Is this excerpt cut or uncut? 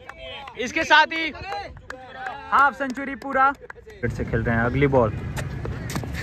cut